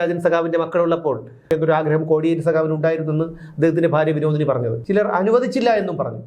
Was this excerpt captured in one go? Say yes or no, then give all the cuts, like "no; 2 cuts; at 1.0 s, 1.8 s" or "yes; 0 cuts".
no; 2 cuts; at 1.5 s, 4.8 s